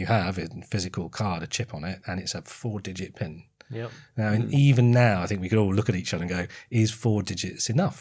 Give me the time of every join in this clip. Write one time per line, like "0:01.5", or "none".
none